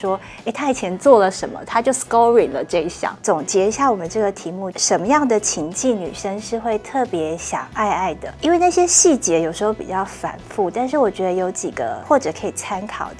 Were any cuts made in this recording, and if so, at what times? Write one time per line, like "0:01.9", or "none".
0:03.2
0:04.7
0:08.3
0:12.0

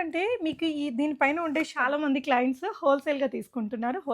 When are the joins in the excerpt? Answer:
0:01.8

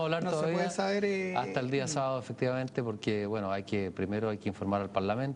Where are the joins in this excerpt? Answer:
none

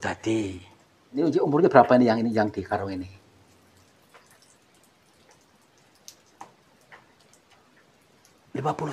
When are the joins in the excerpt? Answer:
0:01.2

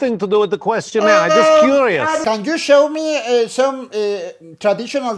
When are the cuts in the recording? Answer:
0:02.2

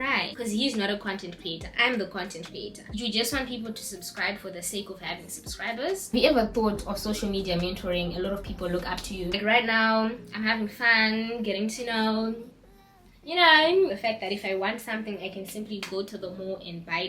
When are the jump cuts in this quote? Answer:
0:02.9
0:06.0
0:09.4
0:14.0

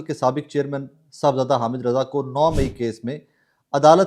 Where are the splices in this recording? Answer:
none

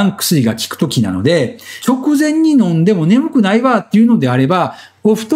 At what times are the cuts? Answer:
0:01.7

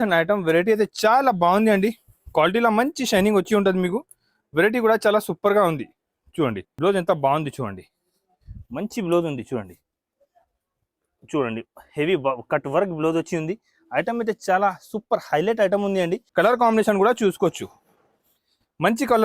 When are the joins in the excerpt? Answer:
0:06.7
0:16.2

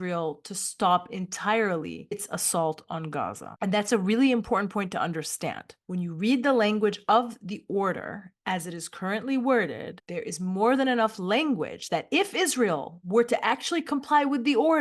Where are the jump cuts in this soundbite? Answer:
none

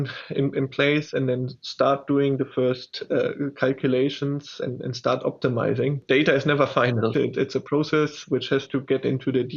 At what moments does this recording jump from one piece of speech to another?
0:07.1

